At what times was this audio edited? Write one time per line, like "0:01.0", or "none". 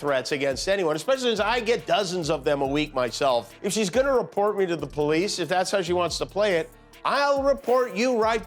0:03.5